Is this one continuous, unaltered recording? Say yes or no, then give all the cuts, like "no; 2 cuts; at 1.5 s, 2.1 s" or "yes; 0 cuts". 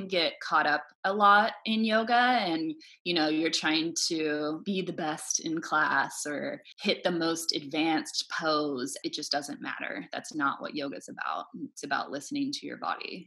no; 3 cuts; at 4.6 s, 6.7 s, 8.9 s